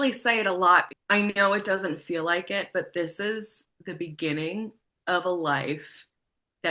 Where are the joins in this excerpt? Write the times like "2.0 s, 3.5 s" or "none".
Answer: 0.9 s